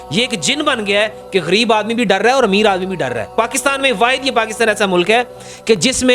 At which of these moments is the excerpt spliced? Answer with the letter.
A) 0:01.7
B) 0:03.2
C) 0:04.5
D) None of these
B